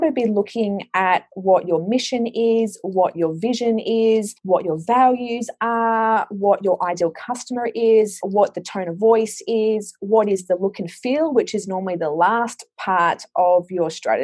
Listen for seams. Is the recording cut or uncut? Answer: cut